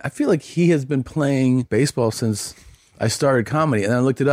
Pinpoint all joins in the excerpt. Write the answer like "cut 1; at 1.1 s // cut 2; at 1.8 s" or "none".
cut 1; at 1.7 s